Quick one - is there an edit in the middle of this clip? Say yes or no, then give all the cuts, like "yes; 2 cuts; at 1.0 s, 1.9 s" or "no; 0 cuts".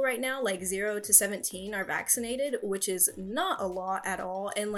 no; 0 cuts